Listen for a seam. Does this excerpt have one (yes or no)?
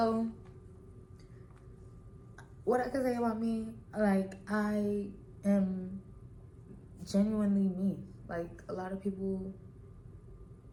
no